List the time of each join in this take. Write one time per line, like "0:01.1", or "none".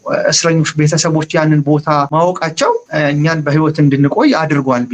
0:02.1
0:02.9